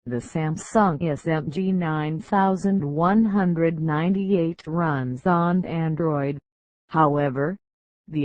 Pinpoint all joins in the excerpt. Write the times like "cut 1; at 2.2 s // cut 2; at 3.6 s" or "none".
cut 1; at 0.9 s